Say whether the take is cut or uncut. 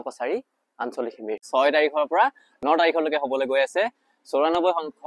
cut